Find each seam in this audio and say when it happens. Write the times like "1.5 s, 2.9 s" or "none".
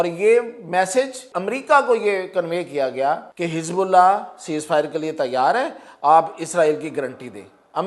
1.3 s, 3.3 s